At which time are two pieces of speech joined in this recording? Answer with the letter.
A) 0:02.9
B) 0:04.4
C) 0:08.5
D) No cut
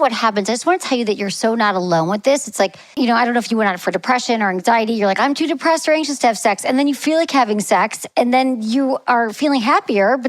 A